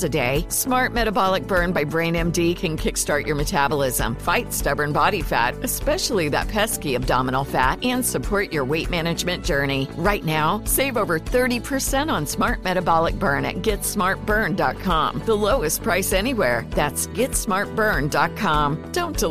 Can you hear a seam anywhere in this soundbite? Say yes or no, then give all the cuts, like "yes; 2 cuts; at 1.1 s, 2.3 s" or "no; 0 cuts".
no; 0 cuts